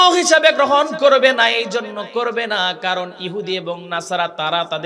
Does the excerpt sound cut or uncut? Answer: uncut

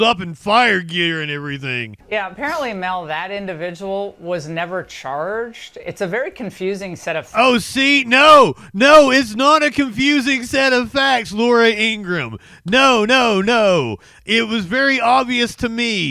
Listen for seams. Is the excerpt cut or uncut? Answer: cut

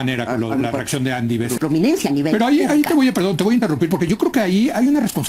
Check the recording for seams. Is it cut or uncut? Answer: cut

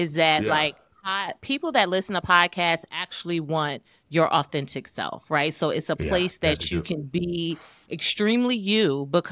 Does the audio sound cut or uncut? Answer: uncut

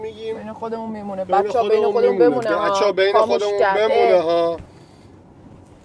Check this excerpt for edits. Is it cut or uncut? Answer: uncut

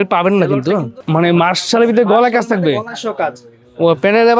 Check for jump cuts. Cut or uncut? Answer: cut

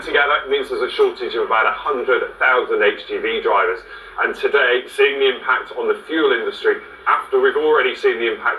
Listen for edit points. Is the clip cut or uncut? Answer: uncut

